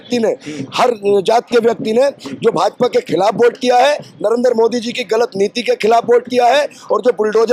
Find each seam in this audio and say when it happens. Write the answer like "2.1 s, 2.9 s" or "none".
none

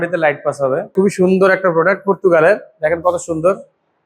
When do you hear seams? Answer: 1.0 s

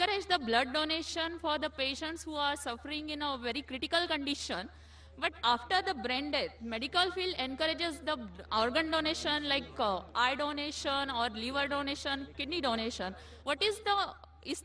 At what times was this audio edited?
11.5 s

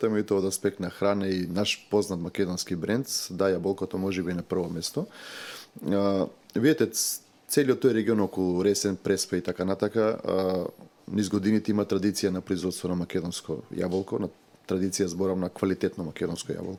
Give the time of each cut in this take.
none

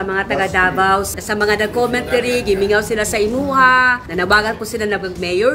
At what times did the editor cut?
1.1 s, 4.0 s

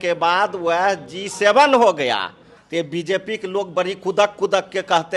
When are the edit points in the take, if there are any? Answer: 2.6 s

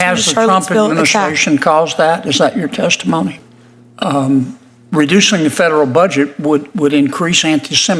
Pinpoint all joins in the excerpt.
3.5 s

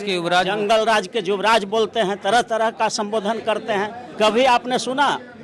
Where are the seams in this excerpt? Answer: 4.0 s

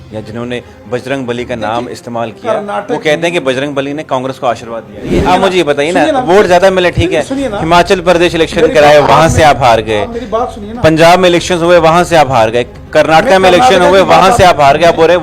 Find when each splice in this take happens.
5.2 s

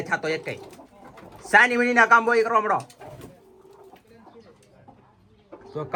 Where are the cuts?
none

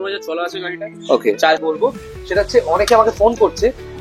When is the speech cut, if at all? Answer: 1.6 s

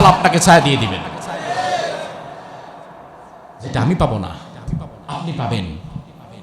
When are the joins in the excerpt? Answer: none

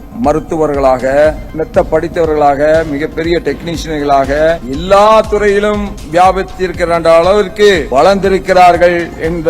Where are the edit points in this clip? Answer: 1.5 s, 4.7 s, 7.8 s

